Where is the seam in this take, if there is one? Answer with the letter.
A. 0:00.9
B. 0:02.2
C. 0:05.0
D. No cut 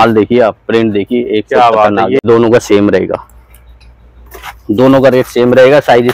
B